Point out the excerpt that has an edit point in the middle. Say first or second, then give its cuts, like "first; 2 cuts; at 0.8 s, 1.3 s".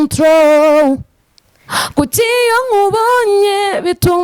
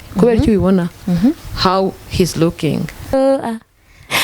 second; 1 cut; at 3.1 s